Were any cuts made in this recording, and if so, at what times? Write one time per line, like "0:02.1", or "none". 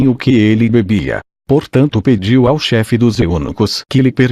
0:02.1